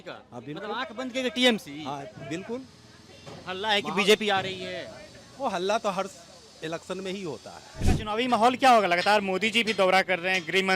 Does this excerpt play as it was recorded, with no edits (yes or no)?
no